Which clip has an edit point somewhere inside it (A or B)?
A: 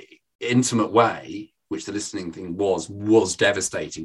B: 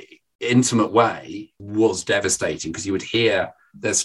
B